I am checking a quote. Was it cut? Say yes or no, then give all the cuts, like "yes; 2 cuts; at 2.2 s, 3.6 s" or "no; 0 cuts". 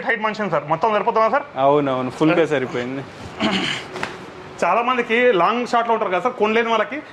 no; 0 cuts